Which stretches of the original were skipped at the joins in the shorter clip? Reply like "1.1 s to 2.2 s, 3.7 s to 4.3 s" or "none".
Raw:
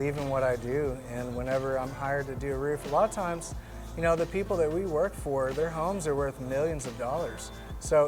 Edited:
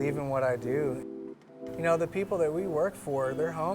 1.2 s to 3.4 s